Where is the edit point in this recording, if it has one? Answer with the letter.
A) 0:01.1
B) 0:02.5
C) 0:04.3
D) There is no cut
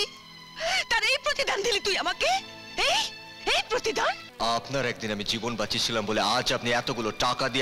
C